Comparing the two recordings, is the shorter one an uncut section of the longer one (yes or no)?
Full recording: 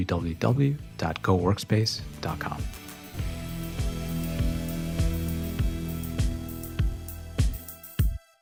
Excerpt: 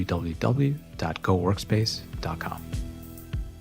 no